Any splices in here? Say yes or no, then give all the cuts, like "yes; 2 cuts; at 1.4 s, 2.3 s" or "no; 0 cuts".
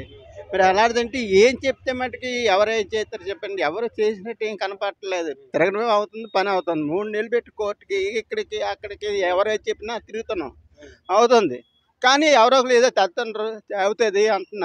no; 0 cuts